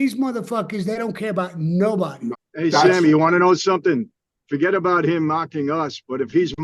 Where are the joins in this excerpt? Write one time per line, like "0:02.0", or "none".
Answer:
0:02.4